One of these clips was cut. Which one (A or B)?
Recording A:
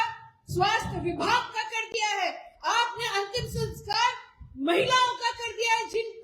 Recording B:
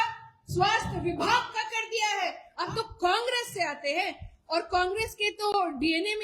B